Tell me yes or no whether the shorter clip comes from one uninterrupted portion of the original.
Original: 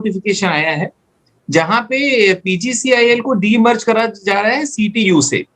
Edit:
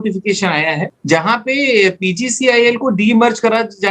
no